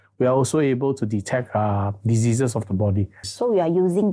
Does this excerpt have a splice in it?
yes; 1 cut; at 3.2 s

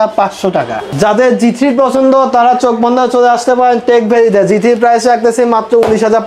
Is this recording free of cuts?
yes; 0 cuts

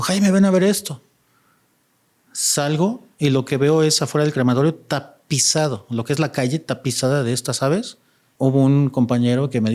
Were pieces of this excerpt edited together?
yes; 1 cut; at 8.4 s

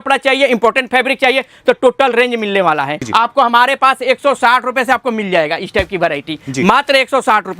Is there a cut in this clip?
yes; 1 cut; at 3.0 s

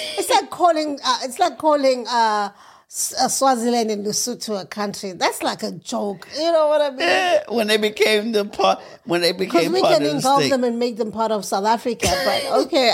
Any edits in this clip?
no; 0 cuts

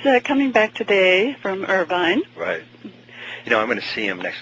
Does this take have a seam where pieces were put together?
no; 0 cuts

